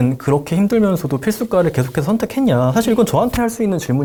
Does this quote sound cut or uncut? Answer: uncut